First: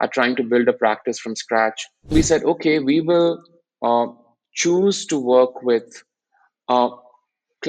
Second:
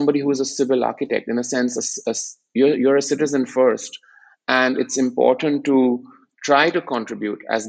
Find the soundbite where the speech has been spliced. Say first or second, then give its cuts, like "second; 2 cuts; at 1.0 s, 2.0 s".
first; 1 cut; at 2.1 s